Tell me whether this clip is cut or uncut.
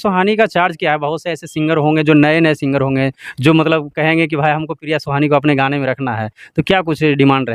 uncut